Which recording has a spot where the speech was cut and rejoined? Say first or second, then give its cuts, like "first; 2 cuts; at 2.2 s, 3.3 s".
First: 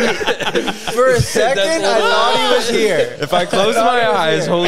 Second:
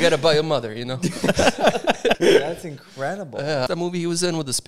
second; 2 cuts; at 2.2 s, 3.7 s